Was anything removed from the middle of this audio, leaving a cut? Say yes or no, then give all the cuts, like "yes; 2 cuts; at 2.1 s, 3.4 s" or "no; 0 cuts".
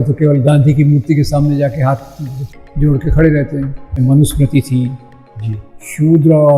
yes; 1 cut; at 3.9 s